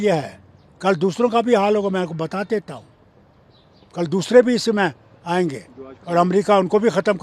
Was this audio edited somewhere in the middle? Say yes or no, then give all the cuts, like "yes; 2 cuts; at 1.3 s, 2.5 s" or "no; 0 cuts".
no; 0 cuts